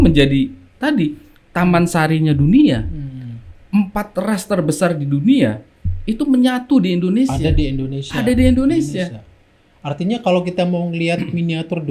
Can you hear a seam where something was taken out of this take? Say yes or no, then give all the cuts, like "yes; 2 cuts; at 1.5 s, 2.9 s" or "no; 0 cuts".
no; 0 cuts